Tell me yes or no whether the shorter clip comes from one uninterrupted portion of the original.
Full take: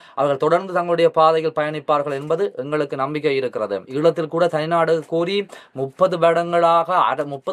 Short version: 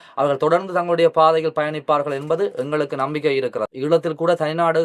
no